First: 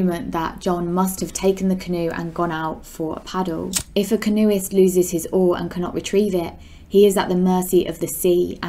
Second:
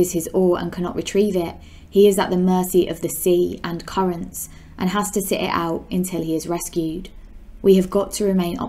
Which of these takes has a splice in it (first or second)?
first